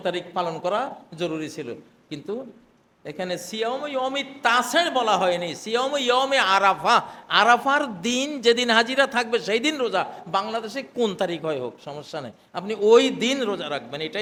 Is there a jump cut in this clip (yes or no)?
no